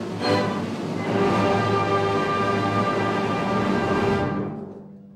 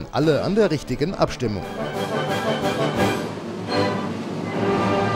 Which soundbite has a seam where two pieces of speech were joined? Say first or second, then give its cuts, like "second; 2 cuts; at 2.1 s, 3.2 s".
second; 1 cut; at 1.7 s